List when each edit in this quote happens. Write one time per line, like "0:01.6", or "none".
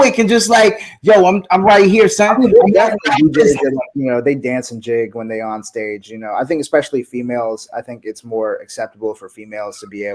none